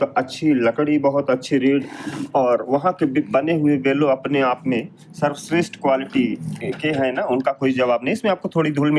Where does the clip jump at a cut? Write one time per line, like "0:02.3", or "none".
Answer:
none